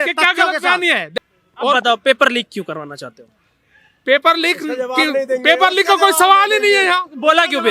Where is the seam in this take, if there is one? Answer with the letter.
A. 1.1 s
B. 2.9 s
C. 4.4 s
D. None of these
A